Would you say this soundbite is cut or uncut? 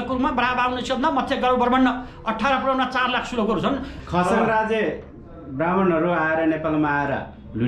cut